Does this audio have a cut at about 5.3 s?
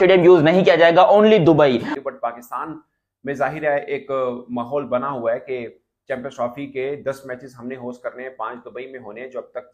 no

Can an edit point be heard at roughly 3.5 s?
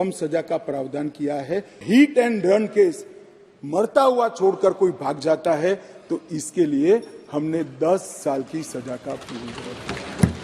no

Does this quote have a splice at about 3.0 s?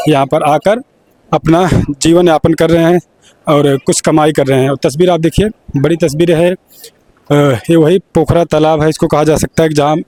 no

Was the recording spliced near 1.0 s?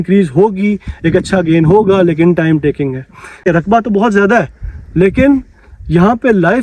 no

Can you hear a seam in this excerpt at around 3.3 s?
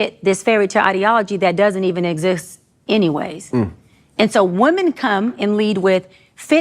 yes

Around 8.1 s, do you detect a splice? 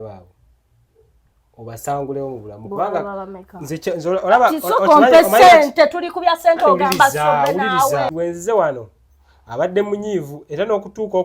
yes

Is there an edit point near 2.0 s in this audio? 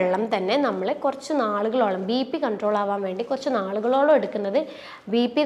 no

